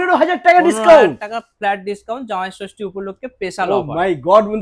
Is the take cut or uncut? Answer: uncut